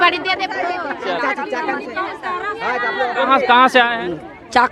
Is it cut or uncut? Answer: uncut